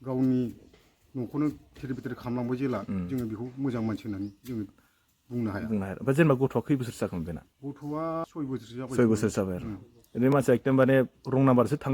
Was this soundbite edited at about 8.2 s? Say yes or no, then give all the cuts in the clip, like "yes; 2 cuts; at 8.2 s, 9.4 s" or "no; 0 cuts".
yes; 1 cut; at 8.2 s